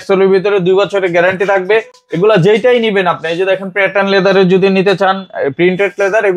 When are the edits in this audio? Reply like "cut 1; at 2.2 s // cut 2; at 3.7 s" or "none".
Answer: none